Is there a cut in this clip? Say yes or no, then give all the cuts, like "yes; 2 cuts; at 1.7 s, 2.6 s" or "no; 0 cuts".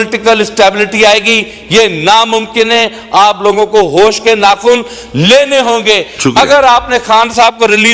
no; 0 cuts